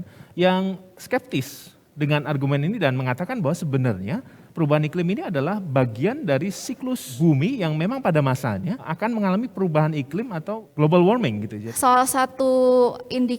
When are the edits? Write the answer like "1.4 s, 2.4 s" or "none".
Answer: 7.1 s, 8.9 s, 9.5 s, 10.6 s, 11.6 s